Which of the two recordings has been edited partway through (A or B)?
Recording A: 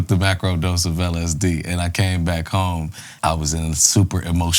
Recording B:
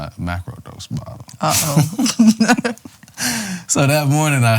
A